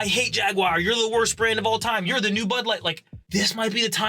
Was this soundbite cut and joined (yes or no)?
yes